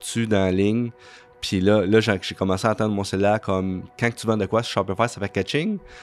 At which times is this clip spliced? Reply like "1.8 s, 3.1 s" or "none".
none